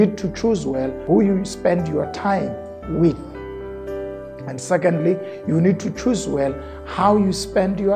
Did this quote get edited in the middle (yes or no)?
yes